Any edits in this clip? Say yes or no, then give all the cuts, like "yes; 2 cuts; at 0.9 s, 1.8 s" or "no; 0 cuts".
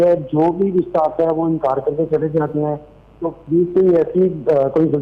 no; 0 cuts